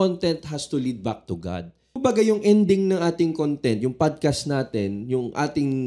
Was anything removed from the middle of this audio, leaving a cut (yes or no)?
yes